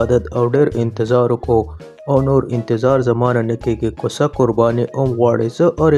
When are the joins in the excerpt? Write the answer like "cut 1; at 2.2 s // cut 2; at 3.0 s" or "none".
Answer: none